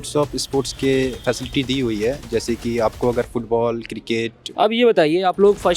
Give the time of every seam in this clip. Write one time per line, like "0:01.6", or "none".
0:04.4

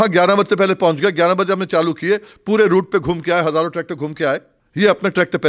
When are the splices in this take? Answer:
0:04.6

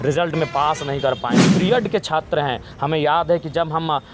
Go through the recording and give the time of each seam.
0:01.4

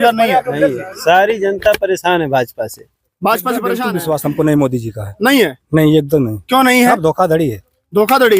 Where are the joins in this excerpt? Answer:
0:03.8

